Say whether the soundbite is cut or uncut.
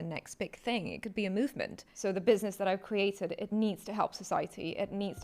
cut